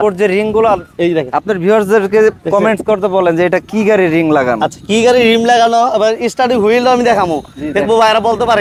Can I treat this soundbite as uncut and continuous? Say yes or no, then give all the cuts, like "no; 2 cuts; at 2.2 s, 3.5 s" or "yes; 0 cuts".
yes; 0 cuts